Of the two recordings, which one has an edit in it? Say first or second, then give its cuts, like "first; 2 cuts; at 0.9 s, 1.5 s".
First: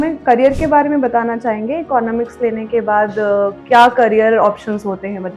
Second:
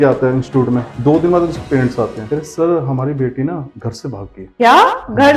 second; 3 cuts; at 0.9 s, 2.2 s, 3.9 s